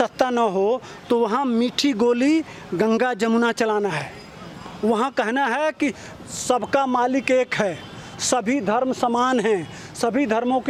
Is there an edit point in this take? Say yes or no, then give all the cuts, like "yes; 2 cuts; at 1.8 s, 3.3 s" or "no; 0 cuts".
no; 0 cuts